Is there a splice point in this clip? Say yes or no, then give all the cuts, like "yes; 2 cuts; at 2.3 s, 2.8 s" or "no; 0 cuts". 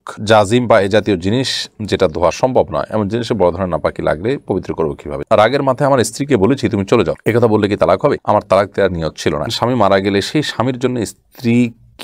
yes; 2 cuts; at 5.2 s, 9.5 s